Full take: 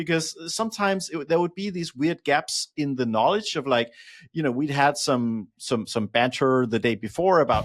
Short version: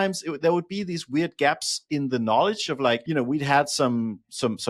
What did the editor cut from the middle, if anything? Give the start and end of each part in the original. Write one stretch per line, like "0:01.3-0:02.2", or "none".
0:03.9-0:04.3